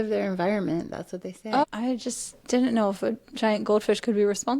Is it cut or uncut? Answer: cut